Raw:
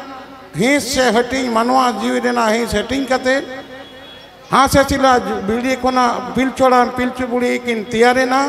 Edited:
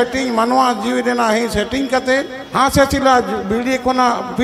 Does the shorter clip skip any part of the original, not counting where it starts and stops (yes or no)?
yes